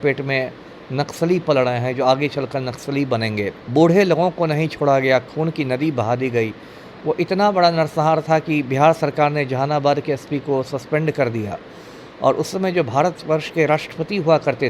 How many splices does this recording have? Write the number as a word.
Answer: zero